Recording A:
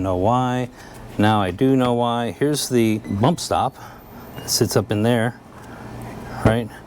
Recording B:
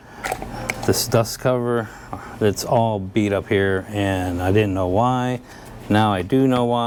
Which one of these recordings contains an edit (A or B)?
A